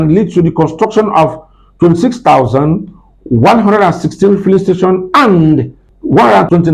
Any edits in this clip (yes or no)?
no